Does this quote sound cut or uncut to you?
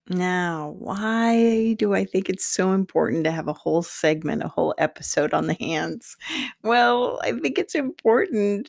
uncut